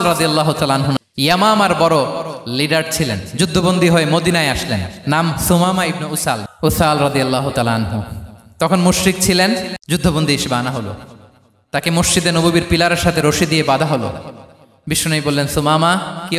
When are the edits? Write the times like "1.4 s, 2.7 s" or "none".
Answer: 1.0 s